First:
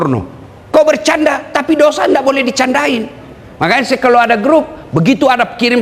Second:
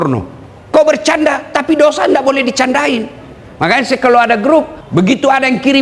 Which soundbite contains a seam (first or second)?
second